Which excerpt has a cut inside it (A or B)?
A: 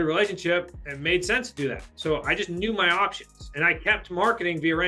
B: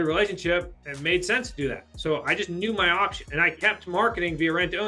B